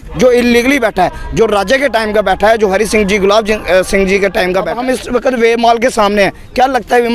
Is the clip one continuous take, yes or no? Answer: no